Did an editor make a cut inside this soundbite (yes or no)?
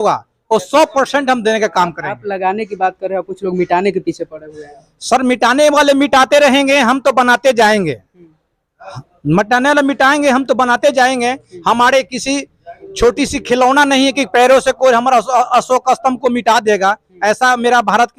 no